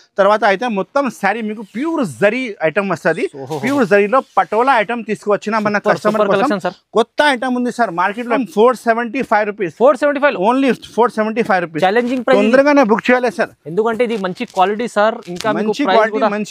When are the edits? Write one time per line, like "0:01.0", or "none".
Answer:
0:08.4

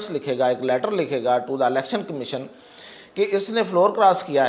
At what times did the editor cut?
none

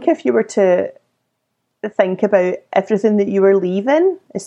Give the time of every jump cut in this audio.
none

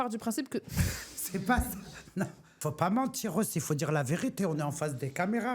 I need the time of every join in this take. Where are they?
0:02.5

